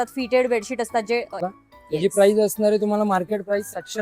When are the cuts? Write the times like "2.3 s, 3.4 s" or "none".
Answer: 1.4 s